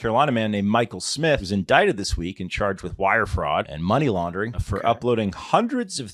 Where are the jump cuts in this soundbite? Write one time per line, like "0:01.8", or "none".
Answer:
0:01.5
0:03.7
0:04.6